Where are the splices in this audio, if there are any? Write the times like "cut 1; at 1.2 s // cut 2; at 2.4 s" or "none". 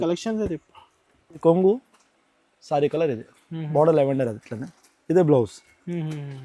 cut 1; at 1.4 s